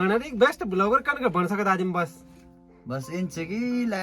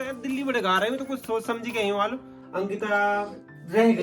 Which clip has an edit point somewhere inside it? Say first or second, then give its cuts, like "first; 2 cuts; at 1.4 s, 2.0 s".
second; 1 cut; at 2.4 s